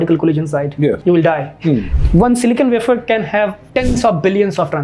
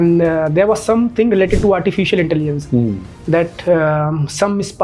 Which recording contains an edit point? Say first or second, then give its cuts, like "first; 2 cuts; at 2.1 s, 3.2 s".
first; 3 cuts; at 1.0 s, 1.9 s, 3.6 s